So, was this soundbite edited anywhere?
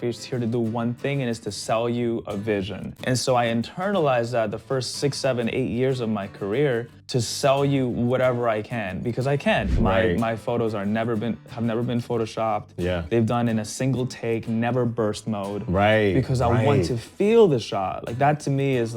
yes; 3 cuts; at 3.0 s, 7.0 s, 9.7 s

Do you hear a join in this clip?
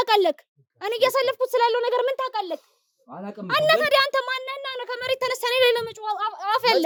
no; 0 cuts

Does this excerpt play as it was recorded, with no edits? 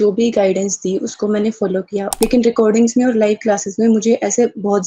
no; 1 cut; at 2.1 s

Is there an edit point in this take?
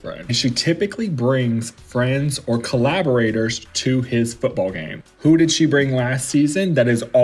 no; 0 cuts

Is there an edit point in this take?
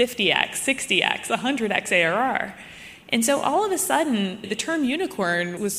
no; 0 cuts

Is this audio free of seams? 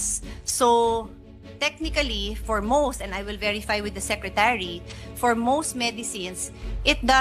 yes; 0 cuts

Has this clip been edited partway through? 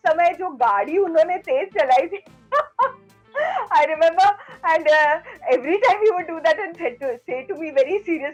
no; 0 cuts

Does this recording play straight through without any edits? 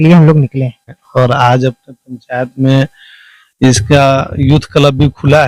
no; 1 cut; at 1.0 s

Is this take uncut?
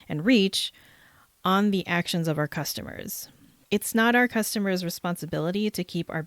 no; 1 cut; at 3.6 s

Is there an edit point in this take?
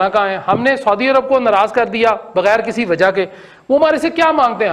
no; 0 cuts

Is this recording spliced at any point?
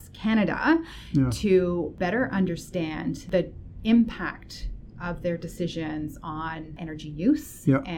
yes; 3 cuts; at 1.9 s, 3.2 s, 6.8 s

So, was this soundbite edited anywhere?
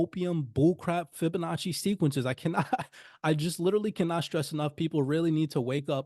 yes; 1 cut; at 1.1 s

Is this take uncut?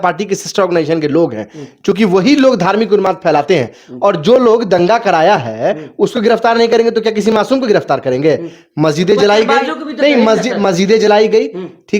yes; 0 cuts

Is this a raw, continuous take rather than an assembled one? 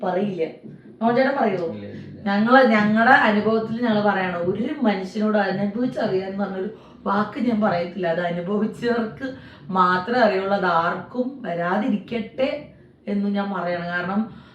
yes; 0 cuts

